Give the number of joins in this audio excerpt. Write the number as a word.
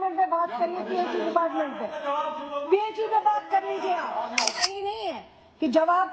one